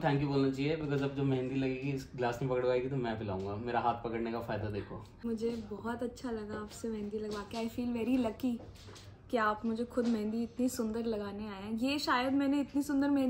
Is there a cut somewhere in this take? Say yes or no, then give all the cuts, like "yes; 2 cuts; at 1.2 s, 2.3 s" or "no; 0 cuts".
yes; 1 cut; at 5.1 s